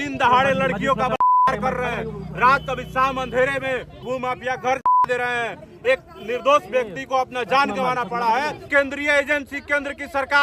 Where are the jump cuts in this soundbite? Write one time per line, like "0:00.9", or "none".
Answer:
0:04.0
0:08.6